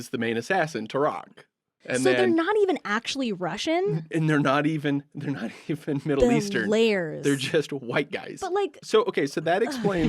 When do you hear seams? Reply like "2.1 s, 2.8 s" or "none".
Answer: 1.7 s, 8.3 s